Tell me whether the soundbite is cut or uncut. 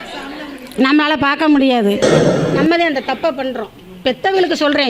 cut